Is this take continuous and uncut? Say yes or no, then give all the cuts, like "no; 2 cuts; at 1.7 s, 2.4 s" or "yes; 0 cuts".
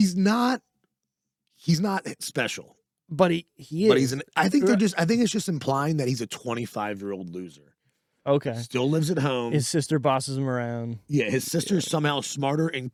yes; 0 cuts